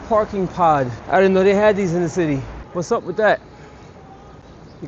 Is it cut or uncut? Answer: cut